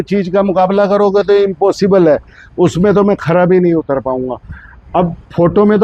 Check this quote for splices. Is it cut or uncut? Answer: uncut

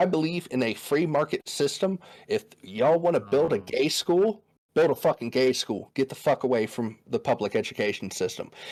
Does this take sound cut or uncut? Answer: uncut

